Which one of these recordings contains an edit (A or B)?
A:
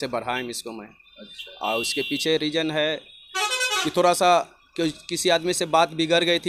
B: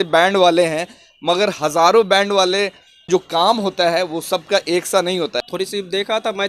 B